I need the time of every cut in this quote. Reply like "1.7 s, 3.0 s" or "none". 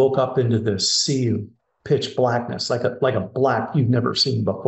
none

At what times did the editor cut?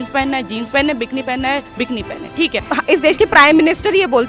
2.6 s

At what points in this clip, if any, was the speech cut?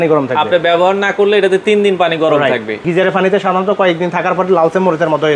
2.7 s

